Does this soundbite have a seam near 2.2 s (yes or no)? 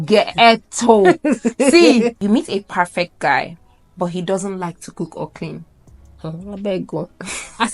yes